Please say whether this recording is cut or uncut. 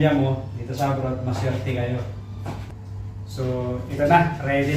cut